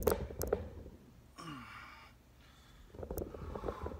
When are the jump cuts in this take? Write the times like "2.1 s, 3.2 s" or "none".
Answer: none